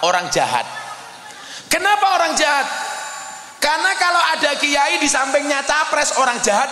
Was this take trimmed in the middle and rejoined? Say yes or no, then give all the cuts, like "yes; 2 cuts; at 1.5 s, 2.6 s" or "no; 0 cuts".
no; 0 cuts